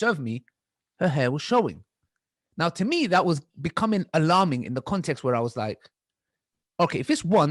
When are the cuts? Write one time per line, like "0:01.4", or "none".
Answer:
none